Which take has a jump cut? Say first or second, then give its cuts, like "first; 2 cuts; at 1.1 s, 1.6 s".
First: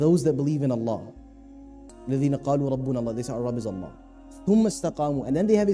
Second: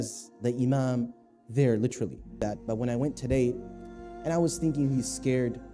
second; 1 cut; at 2.4 s